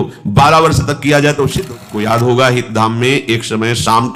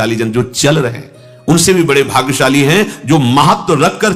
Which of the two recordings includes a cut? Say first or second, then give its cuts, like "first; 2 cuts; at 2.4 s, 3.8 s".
first; 1 cut; at 1.6 s